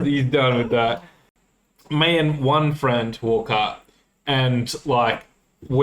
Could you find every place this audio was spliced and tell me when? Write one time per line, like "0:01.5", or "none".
0:01.3

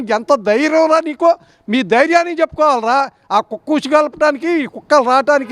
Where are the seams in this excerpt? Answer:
none

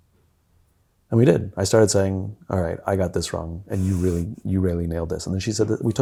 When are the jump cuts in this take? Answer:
none

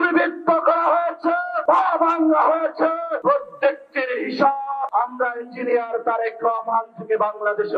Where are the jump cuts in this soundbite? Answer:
0:01.5
0:03.1
0:04.9

